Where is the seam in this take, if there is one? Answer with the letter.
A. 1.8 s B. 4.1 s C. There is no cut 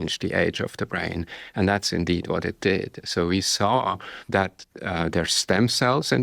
B